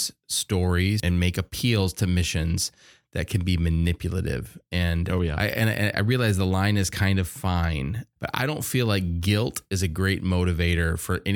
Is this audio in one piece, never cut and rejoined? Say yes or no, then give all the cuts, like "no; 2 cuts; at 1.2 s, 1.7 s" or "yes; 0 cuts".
no; 3 cuts; at 1.0 s, 5.4 s, 8.0 s